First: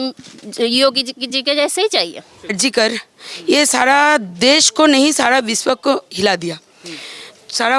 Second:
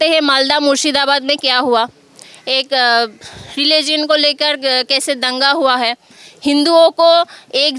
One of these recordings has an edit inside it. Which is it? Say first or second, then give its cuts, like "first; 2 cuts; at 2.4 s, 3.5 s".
first; 1 cut; at 2.6 s